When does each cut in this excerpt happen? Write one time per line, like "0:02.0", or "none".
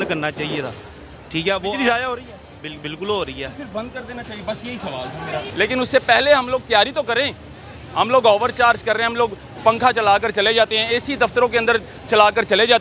0:05.5